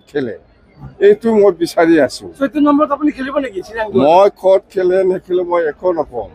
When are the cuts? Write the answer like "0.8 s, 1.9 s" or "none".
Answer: none